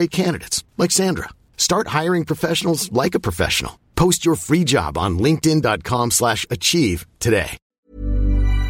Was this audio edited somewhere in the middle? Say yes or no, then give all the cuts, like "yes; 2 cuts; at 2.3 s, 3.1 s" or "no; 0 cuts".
yes; 1 cut; at 7.7 s